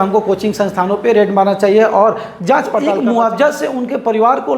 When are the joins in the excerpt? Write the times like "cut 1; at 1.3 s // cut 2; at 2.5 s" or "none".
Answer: cut 1; at 2.9 s